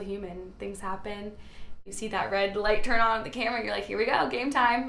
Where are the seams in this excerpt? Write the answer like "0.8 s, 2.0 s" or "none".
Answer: 1.8 s